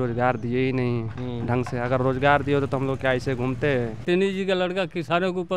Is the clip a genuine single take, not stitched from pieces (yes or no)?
no